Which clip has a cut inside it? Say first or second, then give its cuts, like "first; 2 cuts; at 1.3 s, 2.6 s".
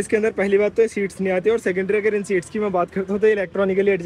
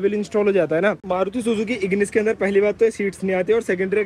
second; 1 cut; at 1.0 s